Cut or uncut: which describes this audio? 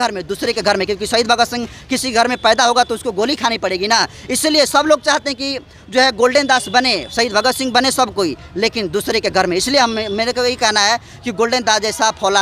uncut